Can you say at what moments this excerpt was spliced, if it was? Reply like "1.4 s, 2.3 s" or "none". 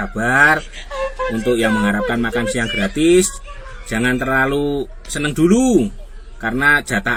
none